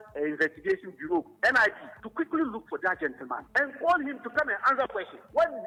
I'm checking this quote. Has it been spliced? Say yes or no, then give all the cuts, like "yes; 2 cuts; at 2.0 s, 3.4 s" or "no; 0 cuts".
no; 0 cuts